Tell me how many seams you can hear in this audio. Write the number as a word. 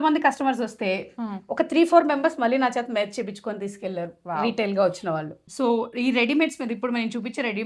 one